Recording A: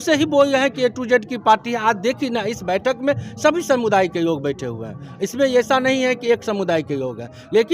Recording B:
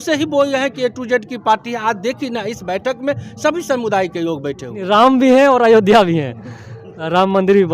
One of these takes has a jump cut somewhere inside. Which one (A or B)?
B